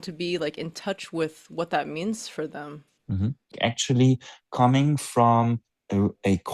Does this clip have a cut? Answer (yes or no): yes